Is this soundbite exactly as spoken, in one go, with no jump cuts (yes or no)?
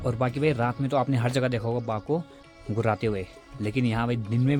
yes